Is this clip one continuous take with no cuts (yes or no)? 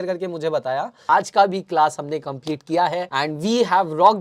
no